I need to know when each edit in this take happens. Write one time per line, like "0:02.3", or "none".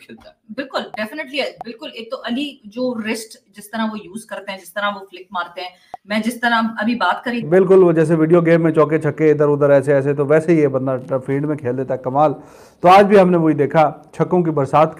0:07.4